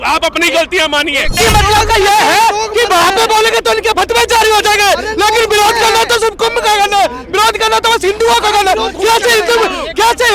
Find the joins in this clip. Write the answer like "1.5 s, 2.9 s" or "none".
1.3 s